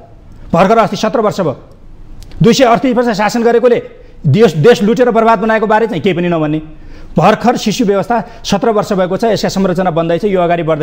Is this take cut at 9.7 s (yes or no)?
no